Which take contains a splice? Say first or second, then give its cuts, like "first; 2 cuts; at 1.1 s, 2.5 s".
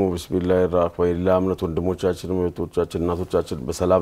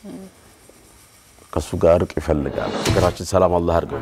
second; 1 cut; at 2.7 s